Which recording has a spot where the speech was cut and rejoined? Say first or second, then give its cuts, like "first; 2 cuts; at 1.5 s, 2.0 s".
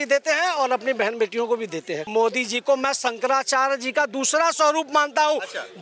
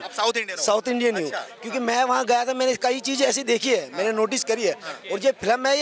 first; 1 cut; at 2.0 s